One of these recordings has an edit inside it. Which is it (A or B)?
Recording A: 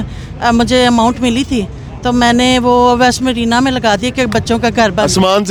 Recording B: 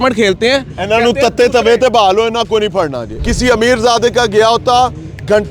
B